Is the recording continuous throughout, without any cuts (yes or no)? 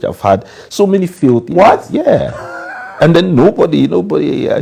yes